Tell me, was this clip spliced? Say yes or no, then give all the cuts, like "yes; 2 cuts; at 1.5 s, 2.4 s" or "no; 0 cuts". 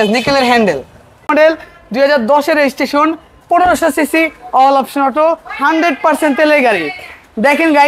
yes; 1 cut; at 1.3 s